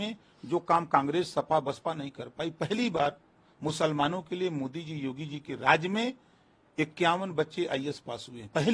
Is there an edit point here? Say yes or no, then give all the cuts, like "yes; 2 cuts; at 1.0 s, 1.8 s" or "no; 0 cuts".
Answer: no; 0 cuts